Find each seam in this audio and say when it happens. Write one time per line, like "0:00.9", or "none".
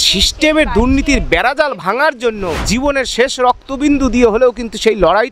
0:02.6